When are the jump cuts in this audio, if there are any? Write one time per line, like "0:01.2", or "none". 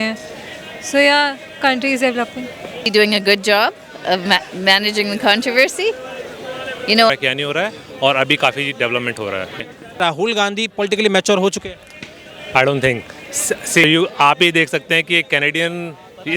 0:02.9
0:07.1
0:10.0
0:13.8

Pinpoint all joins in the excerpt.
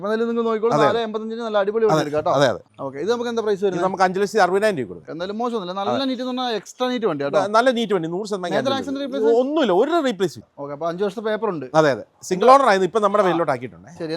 0:02.6
0:05.1
0:10.5

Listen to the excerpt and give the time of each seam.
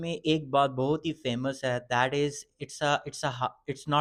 none

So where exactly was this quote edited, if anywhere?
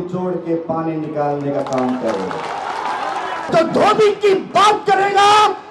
0:03.5

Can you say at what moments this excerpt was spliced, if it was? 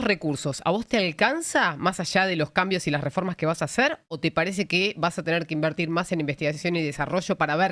none

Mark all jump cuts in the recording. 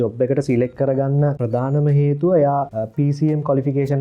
0:01.4
0:02.8

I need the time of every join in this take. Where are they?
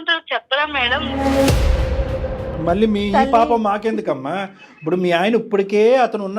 none

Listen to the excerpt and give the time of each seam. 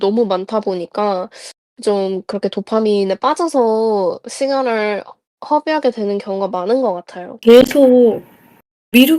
0:07.4

